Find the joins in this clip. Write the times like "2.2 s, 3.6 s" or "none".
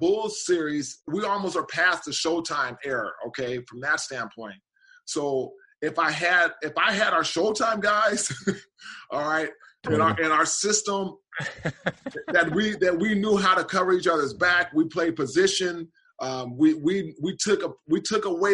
1.1 s